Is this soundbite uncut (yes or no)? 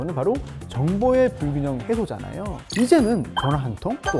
no